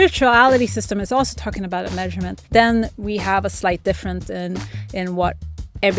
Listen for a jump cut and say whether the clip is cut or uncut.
cut